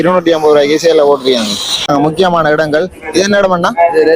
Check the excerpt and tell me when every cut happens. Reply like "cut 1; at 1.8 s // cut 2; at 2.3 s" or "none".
cut 1; at 1.9 s

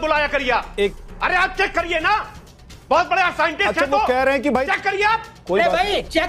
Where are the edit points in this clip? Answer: cut 1; at 0.9 s

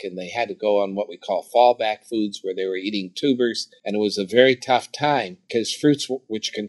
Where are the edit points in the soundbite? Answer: cut 1; at 3.7 s // cut 2; at 5.4 s

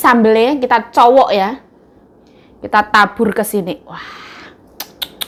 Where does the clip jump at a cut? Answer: none

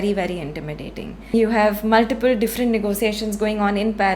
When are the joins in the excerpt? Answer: cut 1; at 1.3 s

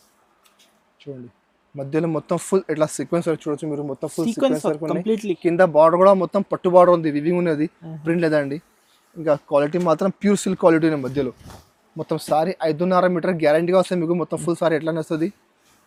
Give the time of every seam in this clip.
none

